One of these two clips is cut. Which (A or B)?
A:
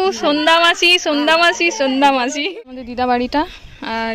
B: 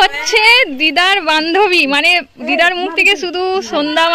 A